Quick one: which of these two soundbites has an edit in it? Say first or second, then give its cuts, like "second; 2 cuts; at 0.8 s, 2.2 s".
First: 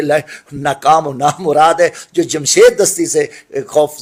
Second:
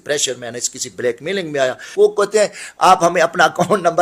second; 1 cut; at 1.9 s